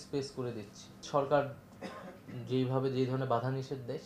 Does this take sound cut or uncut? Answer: cut